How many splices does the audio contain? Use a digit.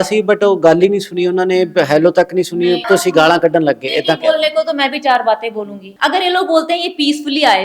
2